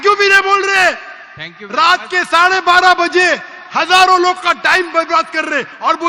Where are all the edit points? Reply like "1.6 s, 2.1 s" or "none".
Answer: none